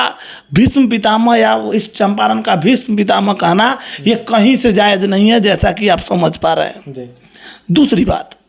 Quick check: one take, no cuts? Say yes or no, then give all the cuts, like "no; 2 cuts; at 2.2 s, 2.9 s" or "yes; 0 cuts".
yes; 0 cuts